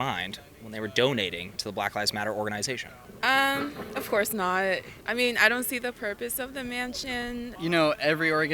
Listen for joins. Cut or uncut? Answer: cut